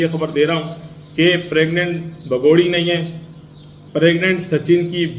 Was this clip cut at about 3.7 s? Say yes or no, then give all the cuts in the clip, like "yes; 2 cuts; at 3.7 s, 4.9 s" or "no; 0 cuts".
no; 0 cuts